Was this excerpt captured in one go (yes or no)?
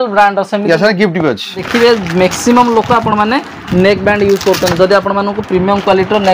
no